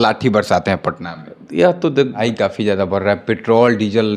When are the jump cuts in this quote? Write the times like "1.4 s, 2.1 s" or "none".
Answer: 2.2 s